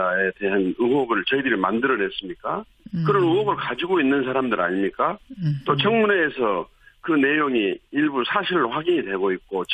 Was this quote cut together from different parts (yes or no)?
no